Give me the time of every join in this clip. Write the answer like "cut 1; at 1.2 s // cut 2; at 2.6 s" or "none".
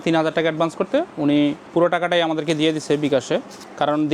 cut 1; at 1.6 s